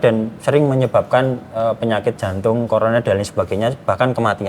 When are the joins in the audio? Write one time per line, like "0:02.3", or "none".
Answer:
none